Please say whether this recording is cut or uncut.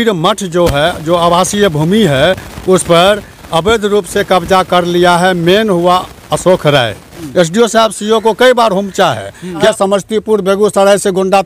cut